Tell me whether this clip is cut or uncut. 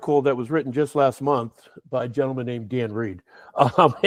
uncut